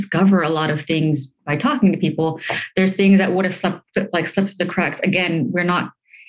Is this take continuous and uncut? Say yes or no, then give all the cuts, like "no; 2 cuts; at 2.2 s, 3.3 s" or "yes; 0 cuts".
yes; 0 cuts